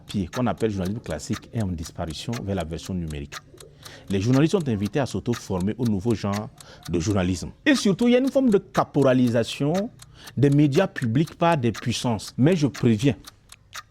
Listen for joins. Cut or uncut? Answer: cut